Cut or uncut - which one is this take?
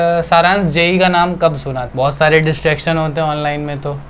cut